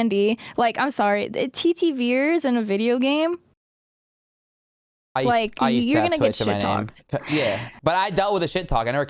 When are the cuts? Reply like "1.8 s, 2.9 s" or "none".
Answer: none